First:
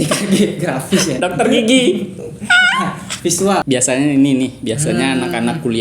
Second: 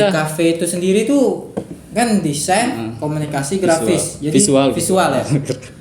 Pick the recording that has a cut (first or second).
first